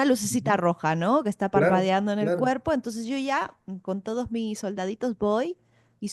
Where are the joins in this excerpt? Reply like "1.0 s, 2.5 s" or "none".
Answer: none

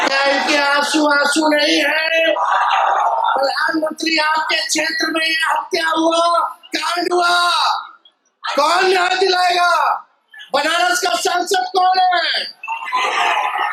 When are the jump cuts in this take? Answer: none

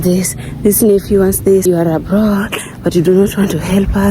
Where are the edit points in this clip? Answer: 1.6 s

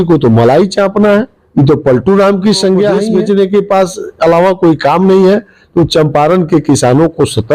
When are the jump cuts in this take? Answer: 3.0 s

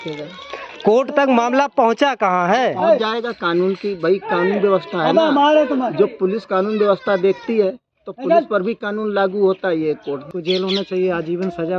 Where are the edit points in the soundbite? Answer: 10.3 s

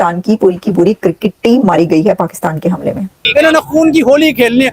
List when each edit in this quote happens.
3.0 s

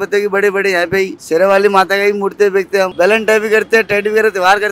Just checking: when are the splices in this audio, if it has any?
1.2 s, 2.9 s

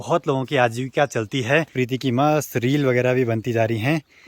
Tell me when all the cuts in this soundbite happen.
1.7 s

